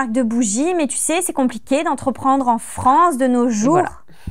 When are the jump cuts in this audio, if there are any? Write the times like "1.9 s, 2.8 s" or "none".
none